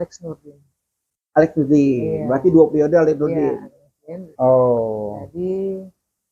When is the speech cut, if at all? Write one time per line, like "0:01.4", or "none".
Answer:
0:04.2